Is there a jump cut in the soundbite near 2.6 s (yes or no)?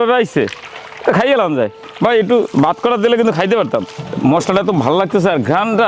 no